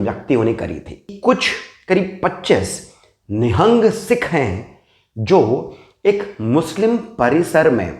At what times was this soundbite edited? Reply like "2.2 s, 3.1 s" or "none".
1.1 s